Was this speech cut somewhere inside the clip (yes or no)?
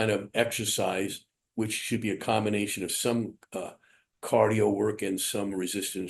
no